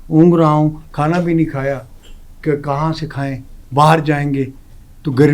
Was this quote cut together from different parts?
no; 0 cuts

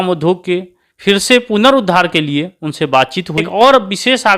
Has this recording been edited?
yes; 1 cut; at 3.5 s

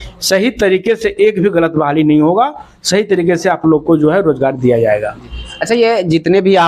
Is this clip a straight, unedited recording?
yes; 0 cuts

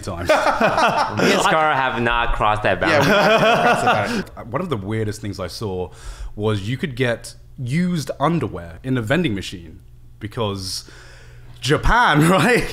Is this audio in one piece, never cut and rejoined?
no; 2 cuts; at 4.3 s, 8.7 s

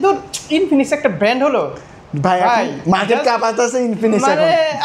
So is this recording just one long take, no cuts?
yes; 0 cuts

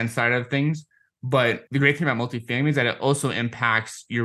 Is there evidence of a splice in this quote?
no; 0 cuts

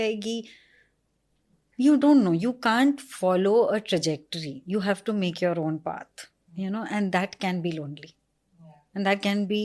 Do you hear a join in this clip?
no; 0 cuts

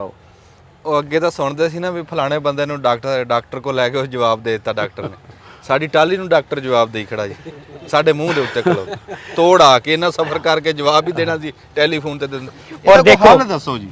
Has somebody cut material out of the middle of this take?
no; 0 cuts

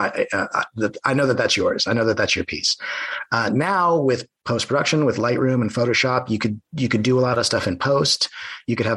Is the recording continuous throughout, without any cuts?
yes; 0 cuts

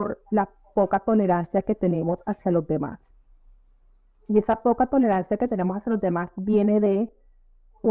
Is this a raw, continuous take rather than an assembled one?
yes; 0 cuts

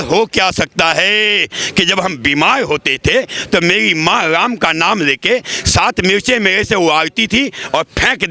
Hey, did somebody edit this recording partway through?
yes; 1 cut; at 1.6 s

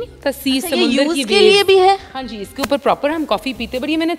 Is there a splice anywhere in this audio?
no; 0 cuts

